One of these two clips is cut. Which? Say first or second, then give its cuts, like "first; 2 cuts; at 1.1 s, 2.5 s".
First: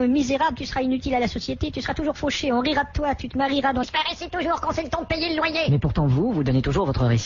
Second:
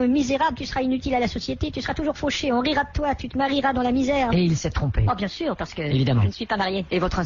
second; 1 cut; at 3.8 s